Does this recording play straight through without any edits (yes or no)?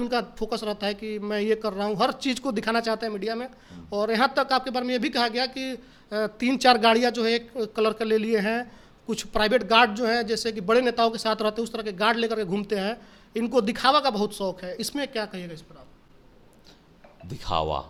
yes